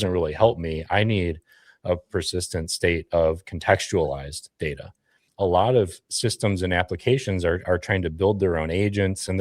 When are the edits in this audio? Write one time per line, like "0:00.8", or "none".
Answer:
0:05.2

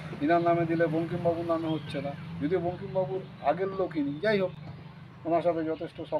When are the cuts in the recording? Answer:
none

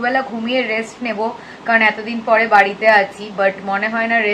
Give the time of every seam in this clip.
none

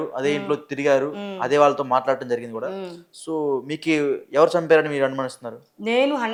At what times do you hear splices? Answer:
none

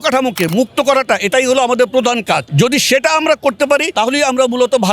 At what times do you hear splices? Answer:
0:02.5
0:03.9

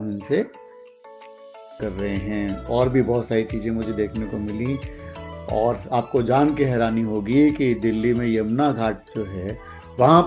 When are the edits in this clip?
0:01.8

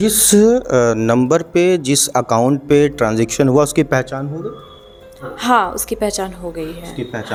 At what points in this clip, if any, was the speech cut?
none

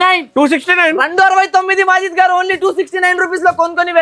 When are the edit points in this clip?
none

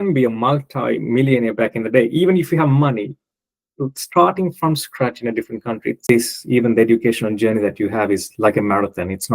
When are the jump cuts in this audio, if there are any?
0:06.0

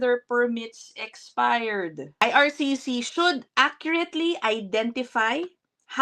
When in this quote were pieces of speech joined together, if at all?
0:02.2

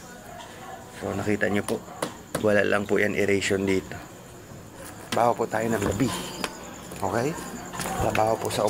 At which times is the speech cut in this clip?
0:05.1

